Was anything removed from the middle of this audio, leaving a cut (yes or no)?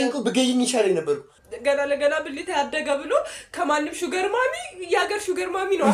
yes